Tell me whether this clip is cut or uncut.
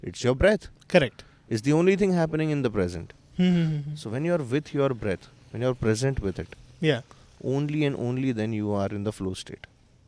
uncut